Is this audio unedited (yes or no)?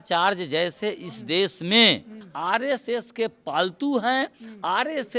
yes